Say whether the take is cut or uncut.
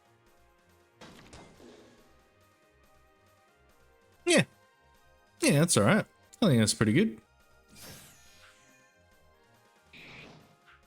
cut